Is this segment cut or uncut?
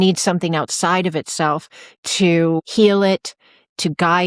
cut